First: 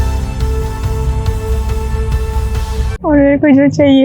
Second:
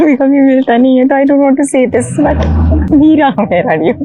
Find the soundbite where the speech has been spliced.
first; 1 cut; at 2.9 s

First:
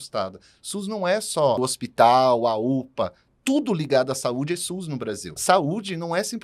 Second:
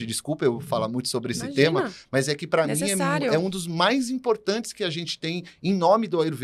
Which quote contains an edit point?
first; 2 cuts; at 1.6 s, 5.3 s

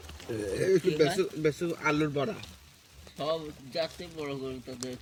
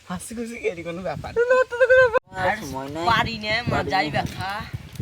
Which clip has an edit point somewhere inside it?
second; 1 cut; at 2.2 s

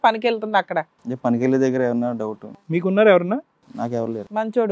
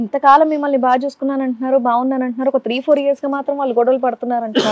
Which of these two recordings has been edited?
first; 1 cut; at 2.6 s

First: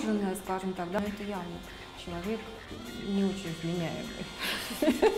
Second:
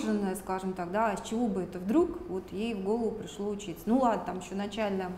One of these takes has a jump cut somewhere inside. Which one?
first; 1 cut; at 1.0 s

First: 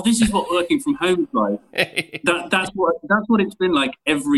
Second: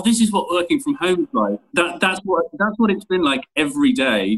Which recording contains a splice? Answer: second; 1 cut; at 1.6 s

